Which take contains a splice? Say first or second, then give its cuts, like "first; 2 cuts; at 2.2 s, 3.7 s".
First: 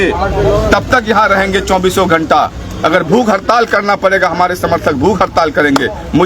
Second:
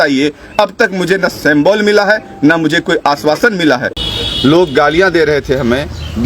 second; 1 cut; at 3.9 s